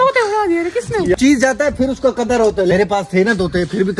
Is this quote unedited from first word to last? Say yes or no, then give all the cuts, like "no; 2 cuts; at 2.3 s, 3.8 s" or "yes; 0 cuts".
no; 1 cut; at 1.2 s